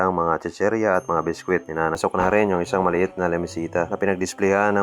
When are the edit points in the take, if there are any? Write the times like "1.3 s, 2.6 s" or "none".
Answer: 2.0 s